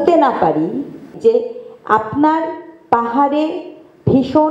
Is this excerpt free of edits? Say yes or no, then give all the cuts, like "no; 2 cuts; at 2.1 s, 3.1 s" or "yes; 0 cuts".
no; 1 cut; at 1.1 s